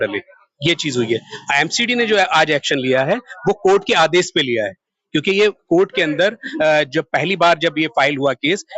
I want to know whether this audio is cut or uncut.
uncut